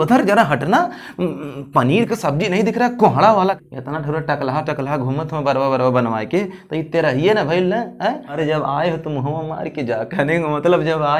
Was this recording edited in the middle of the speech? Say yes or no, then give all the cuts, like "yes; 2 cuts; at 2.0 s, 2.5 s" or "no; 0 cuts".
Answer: yes; 2 cuts; at 3.6 s, 8.3 s